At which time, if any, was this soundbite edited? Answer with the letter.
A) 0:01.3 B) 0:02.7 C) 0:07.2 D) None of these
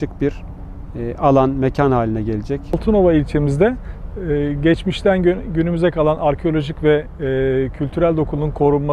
B